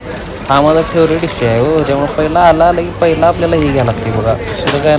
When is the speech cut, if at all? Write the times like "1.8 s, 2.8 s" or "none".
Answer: none